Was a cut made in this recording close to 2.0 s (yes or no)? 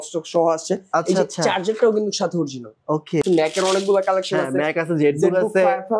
no